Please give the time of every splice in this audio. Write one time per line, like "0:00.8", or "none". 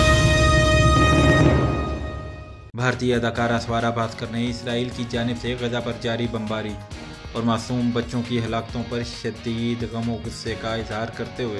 none